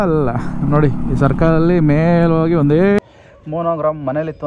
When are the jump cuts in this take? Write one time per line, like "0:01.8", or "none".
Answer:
0:03.0